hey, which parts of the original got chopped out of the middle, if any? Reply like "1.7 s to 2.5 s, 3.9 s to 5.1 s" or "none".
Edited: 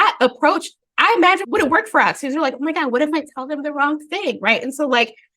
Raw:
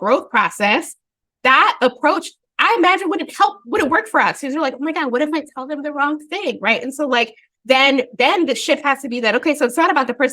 3.0 s to 3.6 s